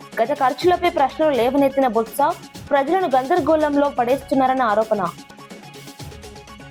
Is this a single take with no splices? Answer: yes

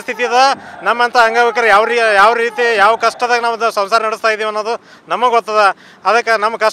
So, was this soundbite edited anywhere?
no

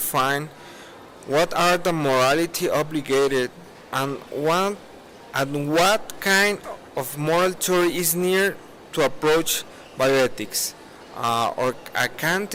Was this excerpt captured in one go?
yes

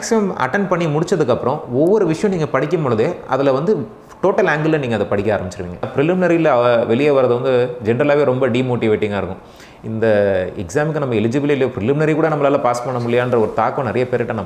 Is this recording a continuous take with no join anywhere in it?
no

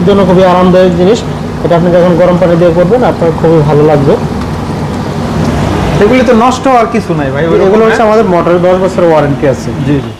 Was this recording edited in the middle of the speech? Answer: no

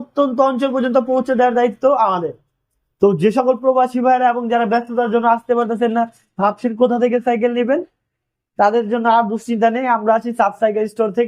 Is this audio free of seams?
yes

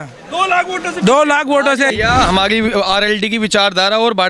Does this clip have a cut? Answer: yes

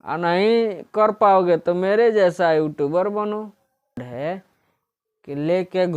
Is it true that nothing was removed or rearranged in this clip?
no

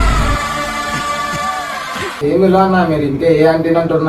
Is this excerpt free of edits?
no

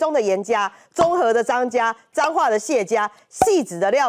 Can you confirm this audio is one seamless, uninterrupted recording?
yes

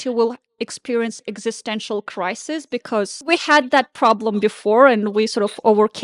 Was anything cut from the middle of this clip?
yes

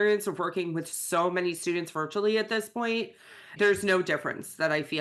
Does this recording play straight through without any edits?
no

